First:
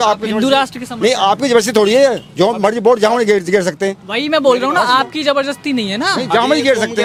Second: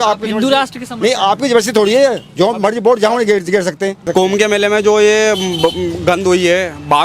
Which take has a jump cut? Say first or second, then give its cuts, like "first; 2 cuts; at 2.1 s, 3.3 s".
second; 1 cut; at 4.1 s